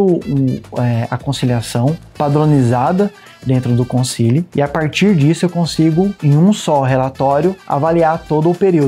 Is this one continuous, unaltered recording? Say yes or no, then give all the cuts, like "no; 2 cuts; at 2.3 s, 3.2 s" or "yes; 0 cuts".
no; 3 cuts; at 4.5 s, 6.2 s, 7.6 s